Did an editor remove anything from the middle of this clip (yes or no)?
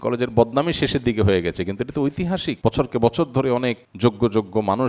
yes